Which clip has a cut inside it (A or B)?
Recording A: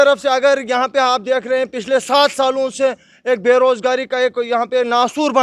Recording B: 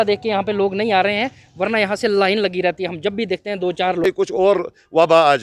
B